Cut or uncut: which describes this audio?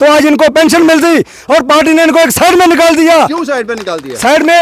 uncut